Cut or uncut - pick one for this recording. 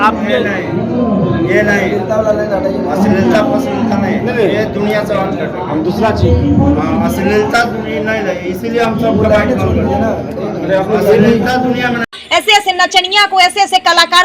cut